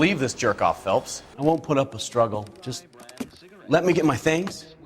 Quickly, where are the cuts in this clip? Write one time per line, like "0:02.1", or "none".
0:01.2